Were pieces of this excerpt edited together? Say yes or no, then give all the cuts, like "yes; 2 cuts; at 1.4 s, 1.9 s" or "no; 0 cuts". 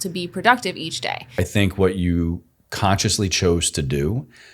yes; 1 cut; at 1.4 s